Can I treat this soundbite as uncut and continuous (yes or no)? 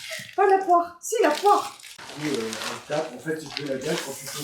no